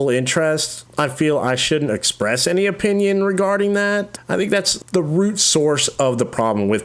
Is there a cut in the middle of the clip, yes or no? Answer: yes